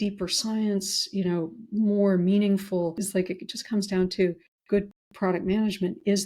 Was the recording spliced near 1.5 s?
no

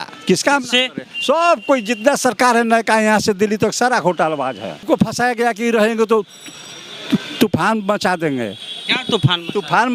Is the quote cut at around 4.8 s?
yes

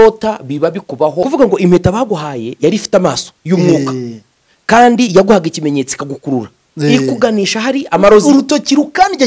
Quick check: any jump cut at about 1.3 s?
yes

